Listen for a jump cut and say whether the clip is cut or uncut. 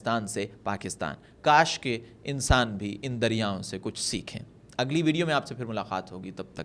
uncut